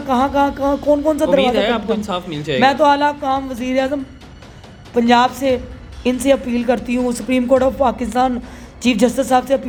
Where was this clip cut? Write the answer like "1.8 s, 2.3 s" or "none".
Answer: none